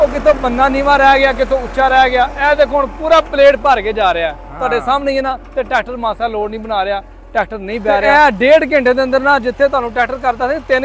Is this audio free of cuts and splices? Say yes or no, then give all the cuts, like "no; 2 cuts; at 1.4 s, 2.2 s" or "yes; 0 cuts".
no; 1 cut; at 8.1 s